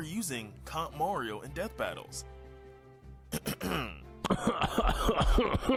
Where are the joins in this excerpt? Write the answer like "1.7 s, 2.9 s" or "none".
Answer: none